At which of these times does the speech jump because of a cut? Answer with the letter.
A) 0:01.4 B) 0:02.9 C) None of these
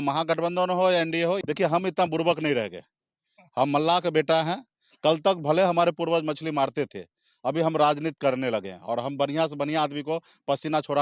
A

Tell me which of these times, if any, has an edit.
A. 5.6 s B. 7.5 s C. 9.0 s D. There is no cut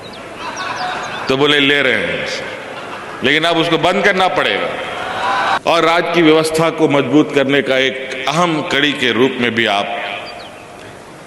A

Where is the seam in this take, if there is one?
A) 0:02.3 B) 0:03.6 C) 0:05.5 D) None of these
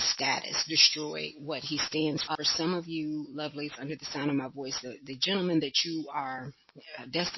A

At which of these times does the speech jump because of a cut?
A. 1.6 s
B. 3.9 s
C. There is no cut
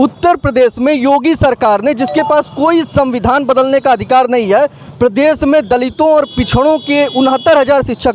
C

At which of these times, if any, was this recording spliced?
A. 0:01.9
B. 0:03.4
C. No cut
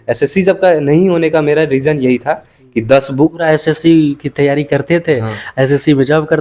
B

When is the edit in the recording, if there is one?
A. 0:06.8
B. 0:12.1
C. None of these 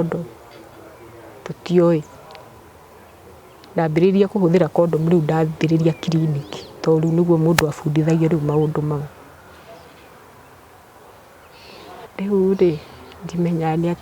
B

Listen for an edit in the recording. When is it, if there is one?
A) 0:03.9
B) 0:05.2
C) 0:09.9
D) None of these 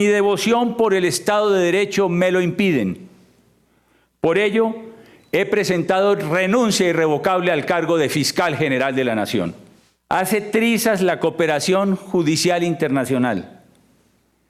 C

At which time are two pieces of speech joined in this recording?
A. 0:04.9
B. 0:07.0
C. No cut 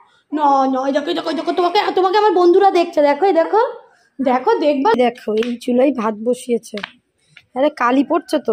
A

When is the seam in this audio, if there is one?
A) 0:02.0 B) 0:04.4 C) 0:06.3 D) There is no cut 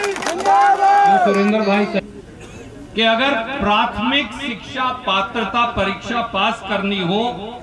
A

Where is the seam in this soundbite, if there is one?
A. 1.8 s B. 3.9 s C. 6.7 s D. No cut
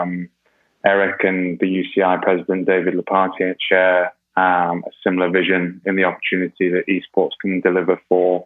D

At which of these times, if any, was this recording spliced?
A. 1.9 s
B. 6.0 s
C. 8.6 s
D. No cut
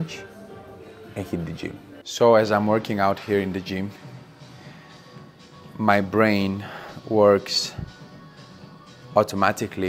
A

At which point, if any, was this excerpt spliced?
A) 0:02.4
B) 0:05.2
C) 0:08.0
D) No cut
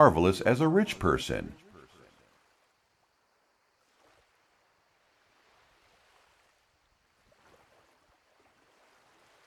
A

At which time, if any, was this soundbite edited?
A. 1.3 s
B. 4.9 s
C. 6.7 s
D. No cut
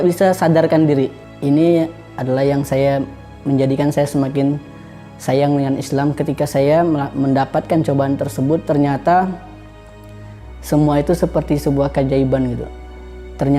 A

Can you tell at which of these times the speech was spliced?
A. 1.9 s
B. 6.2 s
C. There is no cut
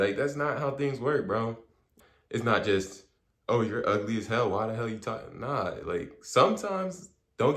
A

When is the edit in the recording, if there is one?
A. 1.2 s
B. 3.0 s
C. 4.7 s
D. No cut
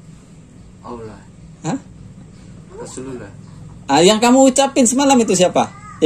D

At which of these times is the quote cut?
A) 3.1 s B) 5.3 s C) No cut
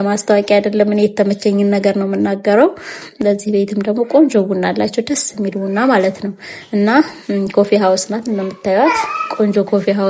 C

